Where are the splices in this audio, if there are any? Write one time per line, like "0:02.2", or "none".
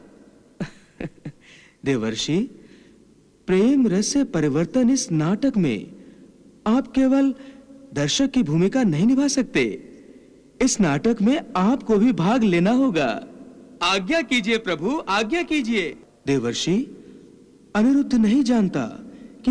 0:16.0